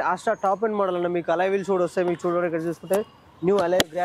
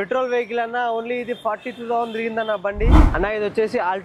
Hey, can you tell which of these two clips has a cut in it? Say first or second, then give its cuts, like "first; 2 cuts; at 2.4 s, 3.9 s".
second; 1 cut; at 3.0 s